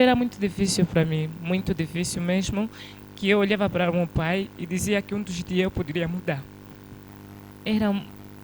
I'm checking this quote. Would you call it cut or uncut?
cut